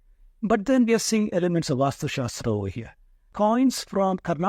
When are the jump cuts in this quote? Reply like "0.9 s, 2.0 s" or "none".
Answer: 3.3 s